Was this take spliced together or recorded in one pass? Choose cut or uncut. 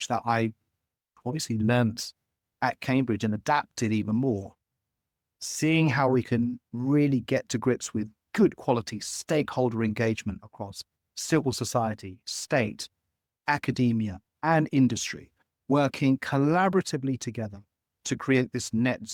uncut